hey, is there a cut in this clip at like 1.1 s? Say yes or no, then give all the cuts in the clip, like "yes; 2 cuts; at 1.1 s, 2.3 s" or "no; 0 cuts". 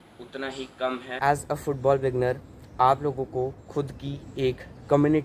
yes; 1 cut; at 1.1 s